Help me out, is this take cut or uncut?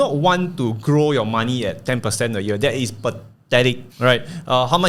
uncut